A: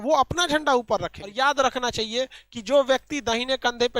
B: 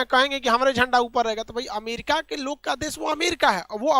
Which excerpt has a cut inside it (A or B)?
A